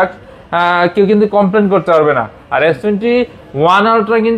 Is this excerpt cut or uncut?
uncut